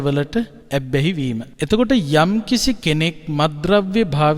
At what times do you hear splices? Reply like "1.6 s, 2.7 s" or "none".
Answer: 1.0 s